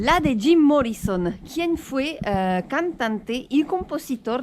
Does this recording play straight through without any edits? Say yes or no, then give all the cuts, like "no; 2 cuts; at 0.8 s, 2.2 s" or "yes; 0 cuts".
yes; 0 cuts